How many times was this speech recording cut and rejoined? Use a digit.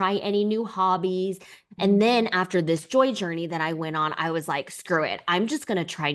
1